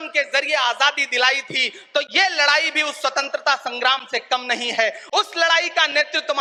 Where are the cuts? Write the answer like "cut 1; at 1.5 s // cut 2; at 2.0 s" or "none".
none